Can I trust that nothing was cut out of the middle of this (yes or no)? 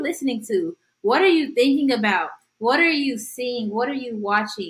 yes